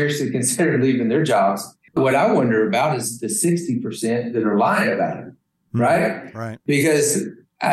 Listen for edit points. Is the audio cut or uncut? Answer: cut